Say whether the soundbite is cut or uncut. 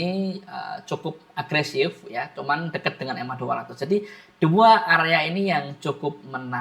uncut